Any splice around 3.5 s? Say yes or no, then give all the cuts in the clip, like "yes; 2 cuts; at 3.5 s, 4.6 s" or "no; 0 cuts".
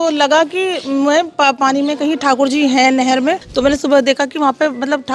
yes; 1 cut; at 3.5 s